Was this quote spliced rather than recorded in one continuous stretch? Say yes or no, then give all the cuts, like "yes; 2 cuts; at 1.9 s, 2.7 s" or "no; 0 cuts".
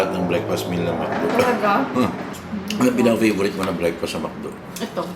yes; 1 cut; at 2.3 s